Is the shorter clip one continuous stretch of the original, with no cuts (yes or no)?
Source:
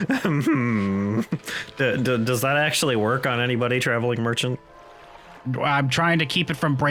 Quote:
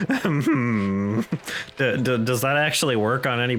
yes